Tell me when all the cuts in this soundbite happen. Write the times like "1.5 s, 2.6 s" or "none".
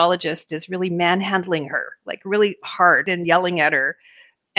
3.1 s

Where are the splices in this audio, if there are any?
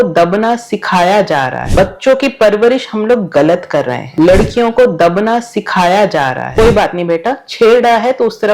1.6 s

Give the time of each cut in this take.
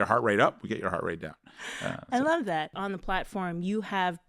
2.8 s

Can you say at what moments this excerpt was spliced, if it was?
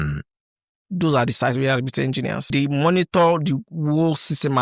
2.5 s

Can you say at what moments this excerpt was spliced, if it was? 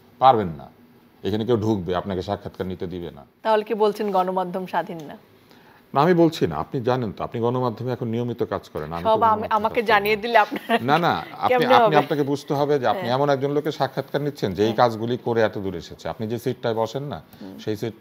3.2 s

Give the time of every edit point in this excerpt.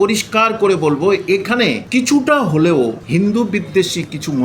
1.8 s, 3.0 s

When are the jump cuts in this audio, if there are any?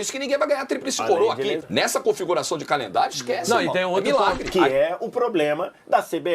1.6 s, 4.4 s

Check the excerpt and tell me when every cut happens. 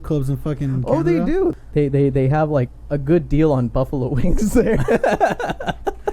1.6 s, 2.8 s

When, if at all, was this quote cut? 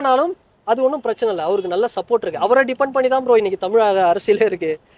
none

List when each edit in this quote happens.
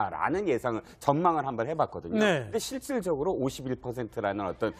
none

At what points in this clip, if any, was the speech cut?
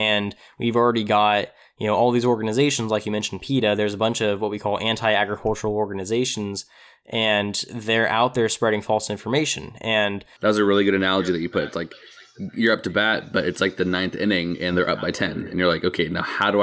10.3 s

